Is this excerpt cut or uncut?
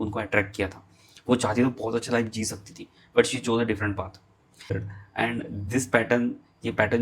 cut